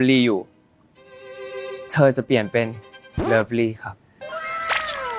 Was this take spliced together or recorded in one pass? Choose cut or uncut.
uncut